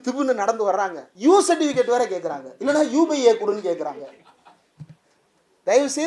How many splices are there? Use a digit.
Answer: 1